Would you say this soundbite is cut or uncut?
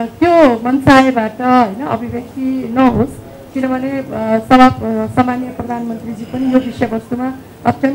uncut